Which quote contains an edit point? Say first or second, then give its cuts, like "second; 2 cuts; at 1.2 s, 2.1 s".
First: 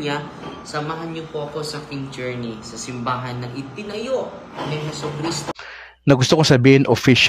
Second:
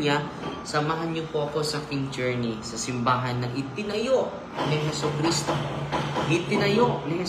first; 1 cut; at 5.5 s